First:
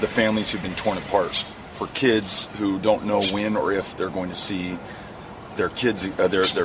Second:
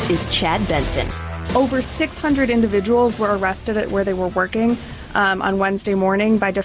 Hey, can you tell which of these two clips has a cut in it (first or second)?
second